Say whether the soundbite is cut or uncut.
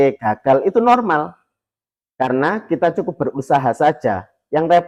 uncut